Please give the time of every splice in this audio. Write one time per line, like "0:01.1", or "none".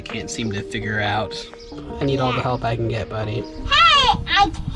0:01.8
0:03.6